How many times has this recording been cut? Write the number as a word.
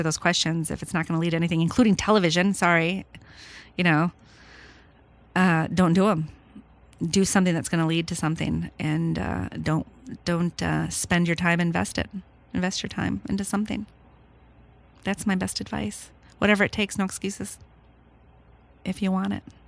one